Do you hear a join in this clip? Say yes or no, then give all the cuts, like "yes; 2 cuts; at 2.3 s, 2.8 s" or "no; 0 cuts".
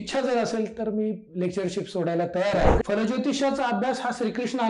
yes; 1 cut; at 2.7 s